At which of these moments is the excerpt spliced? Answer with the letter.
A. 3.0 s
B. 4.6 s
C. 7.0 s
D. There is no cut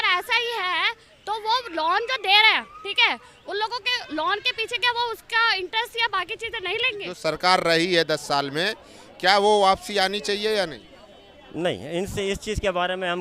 C